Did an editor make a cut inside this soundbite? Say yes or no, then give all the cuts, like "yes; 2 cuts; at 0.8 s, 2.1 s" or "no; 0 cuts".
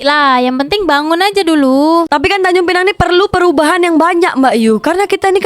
yes; 1 cut; at 2.1 s